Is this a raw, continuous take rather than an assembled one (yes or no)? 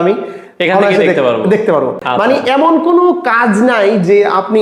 yes